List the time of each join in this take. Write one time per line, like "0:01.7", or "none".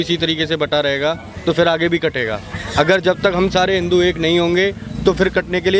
none

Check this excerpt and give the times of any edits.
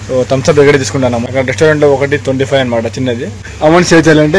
0:01.3
0:03.4

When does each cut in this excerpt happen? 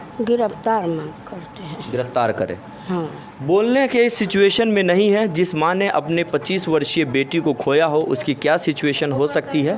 none

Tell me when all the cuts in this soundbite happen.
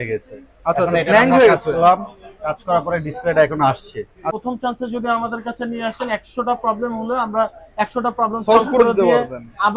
0:04.4

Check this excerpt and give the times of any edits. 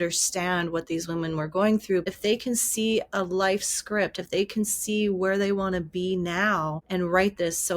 0:02.1
0:06.8

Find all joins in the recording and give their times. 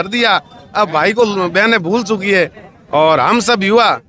none

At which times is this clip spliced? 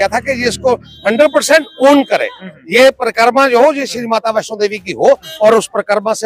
none

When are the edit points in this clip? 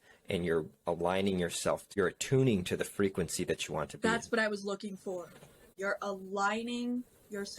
0:01.9
0:05.7

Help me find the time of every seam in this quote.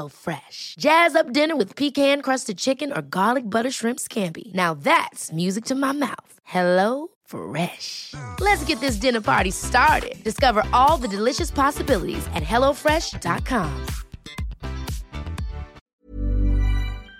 0:15.8

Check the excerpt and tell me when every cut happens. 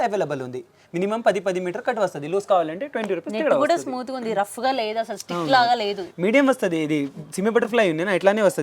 none

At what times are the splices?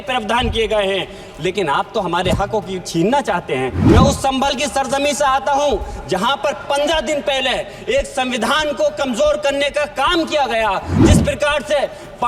0:03.8
0:11.0

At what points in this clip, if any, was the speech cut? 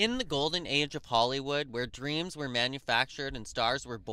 none

